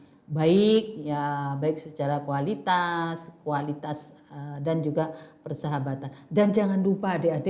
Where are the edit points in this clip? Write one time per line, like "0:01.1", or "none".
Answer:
none